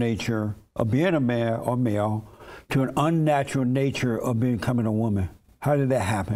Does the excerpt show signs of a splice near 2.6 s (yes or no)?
no